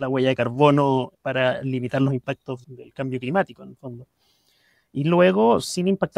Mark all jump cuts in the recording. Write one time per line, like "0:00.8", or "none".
0:01.2
0:02.6